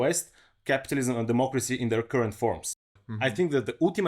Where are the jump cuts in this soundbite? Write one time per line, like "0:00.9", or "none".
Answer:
0:02.9